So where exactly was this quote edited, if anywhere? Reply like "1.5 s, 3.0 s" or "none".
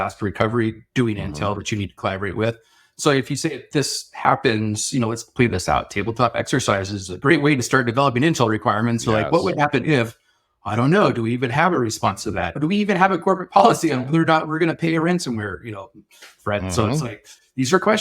12.6 s